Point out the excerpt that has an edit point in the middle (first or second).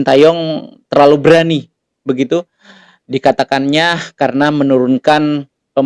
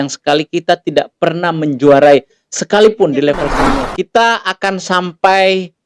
second